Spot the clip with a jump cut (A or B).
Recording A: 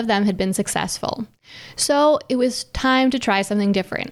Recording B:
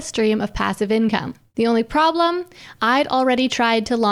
B